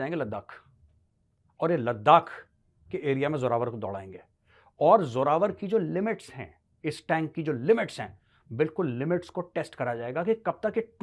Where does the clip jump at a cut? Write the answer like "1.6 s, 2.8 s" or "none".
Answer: none